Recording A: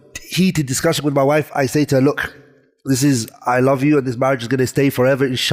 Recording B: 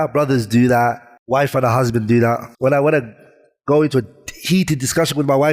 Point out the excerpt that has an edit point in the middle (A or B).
B